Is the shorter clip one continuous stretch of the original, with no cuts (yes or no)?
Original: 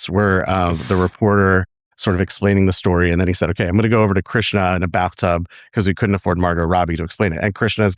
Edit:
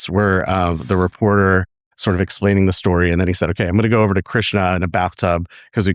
yes